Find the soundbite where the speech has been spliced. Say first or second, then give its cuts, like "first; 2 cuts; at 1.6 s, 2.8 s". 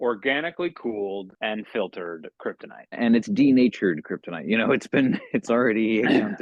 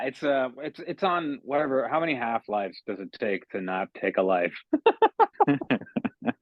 first; 2 cuts; at 1.3 s, 3.0 s